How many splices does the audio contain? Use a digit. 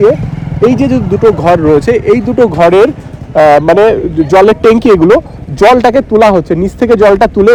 0